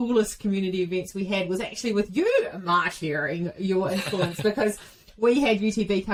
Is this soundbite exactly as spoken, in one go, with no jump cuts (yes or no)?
yes